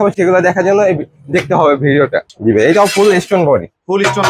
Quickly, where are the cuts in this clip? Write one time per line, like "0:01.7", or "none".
0:02.3